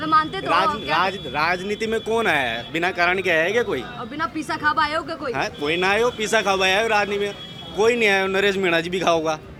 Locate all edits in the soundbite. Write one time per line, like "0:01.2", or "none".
none